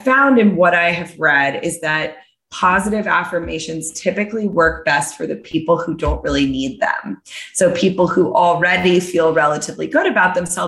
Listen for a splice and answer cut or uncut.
uncut